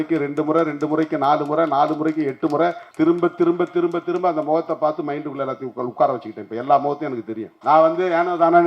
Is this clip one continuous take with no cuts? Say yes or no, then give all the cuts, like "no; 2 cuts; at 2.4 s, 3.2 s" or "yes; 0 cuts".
no; 2 cuts; at 2.8 s, 7.5 s